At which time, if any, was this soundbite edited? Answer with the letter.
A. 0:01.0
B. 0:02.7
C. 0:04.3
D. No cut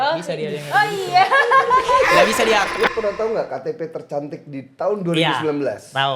B